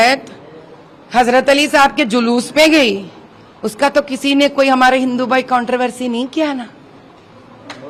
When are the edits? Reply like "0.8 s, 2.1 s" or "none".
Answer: none